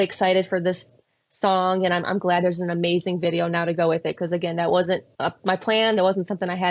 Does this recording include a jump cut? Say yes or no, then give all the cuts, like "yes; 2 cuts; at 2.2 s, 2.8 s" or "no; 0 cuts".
yes; 1 cut; at 5.1 s